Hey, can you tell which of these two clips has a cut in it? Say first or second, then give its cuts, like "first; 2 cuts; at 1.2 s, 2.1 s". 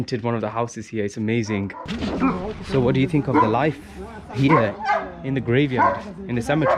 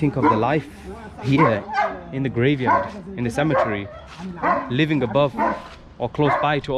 first; 1 cut; at 1.9 s